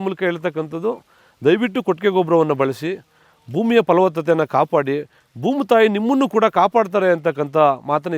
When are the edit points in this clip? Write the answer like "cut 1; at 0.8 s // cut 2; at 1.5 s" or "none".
none